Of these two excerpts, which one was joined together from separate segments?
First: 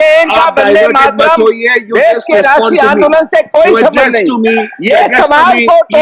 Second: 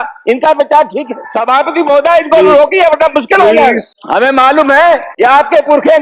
second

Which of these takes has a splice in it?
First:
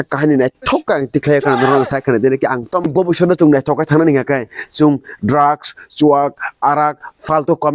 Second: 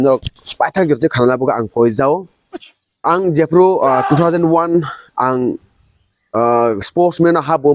first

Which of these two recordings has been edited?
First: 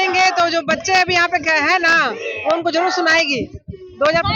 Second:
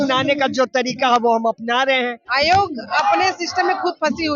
second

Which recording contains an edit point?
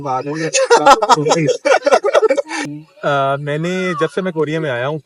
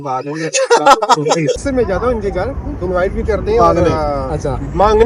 second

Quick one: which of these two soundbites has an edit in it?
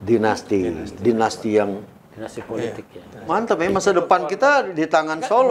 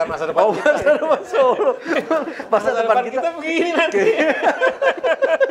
first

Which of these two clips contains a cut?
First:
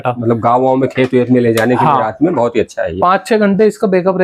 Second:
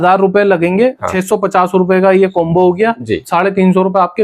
second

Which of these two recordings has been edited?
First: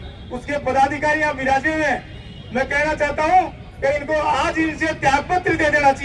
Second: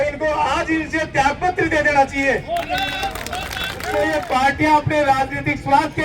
second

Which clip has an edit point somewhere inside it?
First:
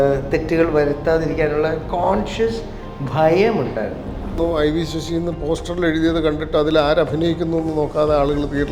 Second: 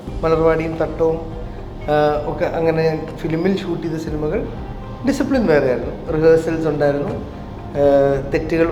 first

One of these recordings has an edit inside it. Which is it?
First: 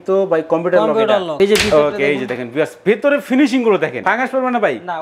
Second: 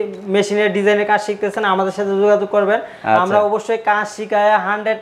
first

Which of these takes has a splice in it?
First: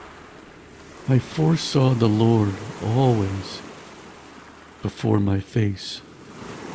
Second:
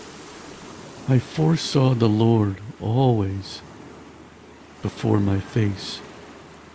first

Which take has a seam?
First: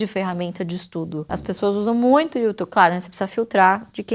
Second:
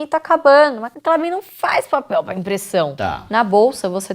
second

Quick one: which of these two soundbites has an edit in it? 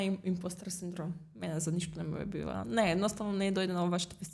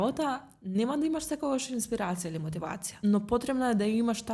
second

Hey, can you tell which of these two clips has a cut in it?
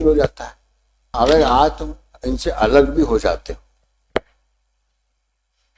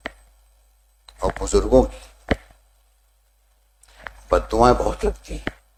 first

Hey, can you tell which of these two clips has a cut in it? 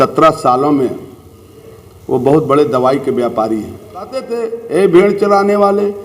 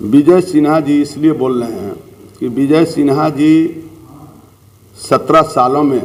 first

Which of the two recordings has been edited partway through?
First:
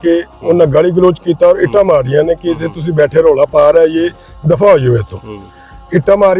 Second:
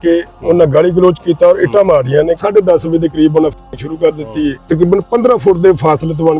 second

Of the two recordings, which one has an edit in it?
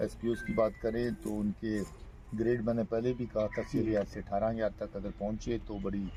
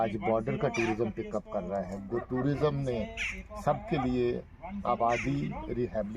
second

